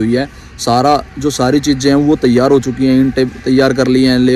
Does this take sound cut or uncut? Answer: uncut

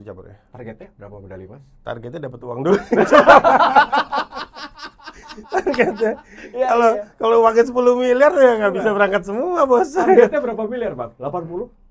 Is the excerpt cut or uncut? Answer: uncut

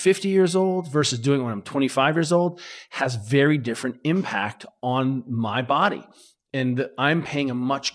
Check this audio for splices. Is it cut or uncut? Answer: uncut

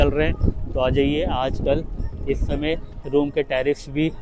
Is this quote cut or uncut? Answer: uncut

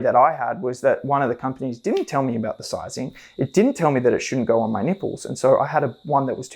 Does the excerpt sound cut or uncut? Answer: uncut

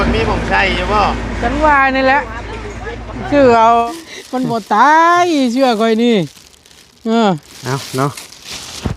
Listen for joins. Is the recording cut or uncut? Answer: cut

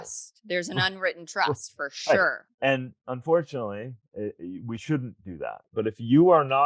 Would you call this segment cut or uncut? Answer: cut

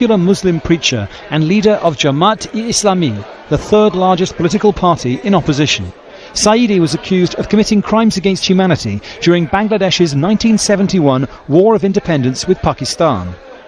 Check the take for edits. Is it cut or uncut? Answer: uncut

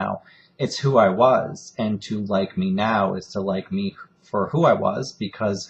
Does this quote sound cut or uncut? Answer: cut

